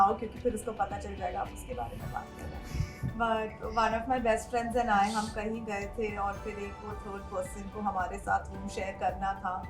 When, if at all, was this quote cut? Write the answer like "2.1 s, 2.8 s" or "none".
none